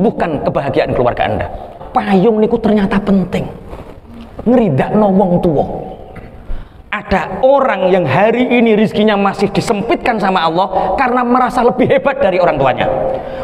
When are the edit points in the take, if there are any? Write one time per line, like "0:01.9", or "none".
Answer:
0:01.7